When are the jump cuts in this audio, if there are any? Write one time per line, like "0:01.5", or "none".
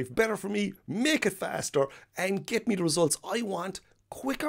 none